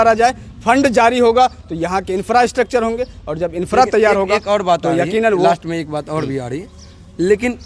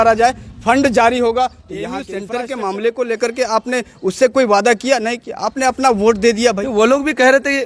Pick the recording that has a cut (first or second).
second